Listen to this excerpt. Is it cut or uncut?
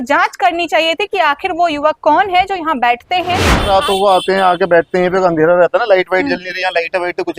cut